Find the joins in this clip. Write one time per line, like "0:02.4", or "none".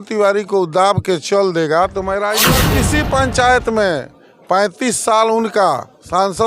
0:02.6